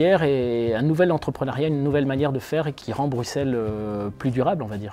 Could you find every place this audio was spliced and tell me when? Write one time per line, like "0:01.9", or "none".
none